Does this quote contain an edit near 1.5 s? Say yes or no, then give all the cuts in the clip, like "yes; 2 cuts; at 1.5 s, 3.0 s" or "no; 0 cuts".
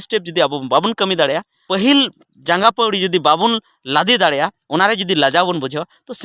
yes; 1 cut; at 1.5 s